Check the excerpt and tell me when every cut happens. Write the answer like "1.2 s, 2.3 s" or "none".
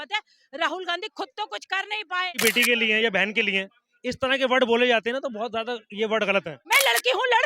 2.4 s, 6.6 s